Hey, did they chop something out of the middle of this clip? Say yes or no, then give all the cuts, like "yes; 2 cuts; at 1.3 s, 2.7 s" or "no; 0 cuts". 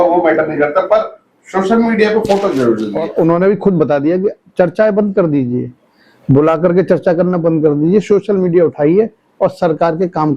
yes; 1 cut; at 3.0 s